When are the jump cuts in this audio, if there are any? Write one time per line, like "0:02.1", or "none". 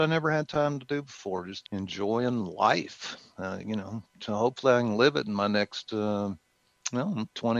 0:01.6